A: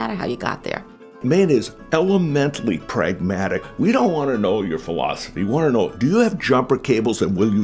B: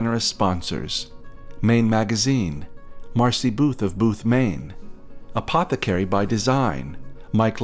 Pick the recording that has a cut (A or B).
A